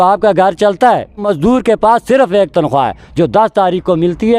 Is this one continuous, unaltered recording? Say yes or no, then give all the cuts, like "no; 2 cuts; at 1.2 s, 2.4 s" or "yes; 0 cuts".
no; 1 cut; at 1.3 s